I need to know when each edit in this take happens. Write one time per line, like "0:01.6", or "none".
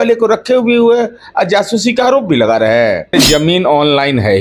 0:03.2